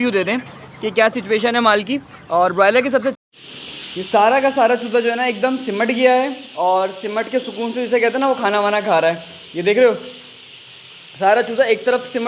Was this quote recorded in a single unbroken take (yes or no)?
no